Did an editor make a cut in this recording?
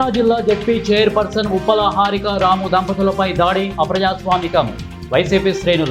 no; 0 cuts

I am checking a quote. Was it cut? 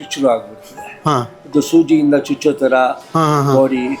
no; 0 cuts

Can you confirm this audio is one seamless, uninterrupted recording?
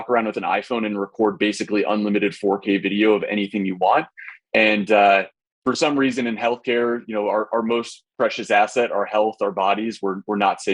yes; 0 cuts

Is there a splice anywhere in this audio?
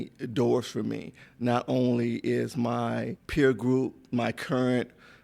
yes; 1 cut; at 3.2 s

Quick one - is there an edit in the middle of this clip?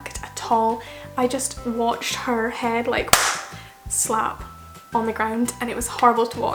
no; 0 cuts

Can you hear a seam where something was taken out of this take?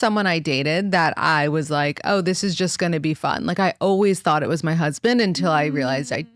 no; 0 cuts

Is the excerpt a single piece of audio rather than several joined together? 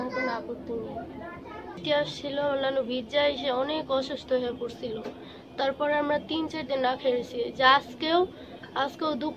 no; 1 cut; at 1.8 s

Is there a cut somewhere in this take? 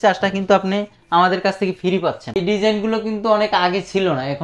yes; 1 cut; at 2.3 s

